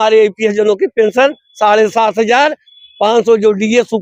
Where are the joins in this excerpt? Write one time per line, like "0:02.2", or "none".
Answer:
none